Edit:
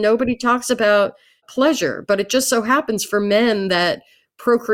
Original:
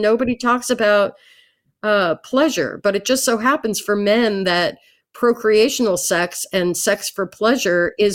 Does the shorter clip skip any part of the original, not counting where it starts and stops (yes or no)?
yes